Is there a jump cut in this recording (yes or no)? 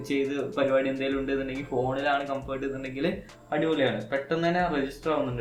no